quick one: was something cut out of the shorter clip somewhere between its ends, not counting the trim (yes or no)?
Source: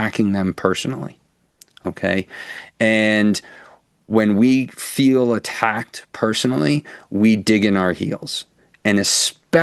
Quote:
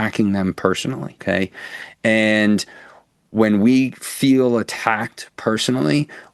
yes